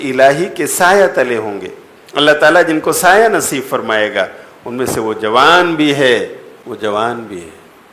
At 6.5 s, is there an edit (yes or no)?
yes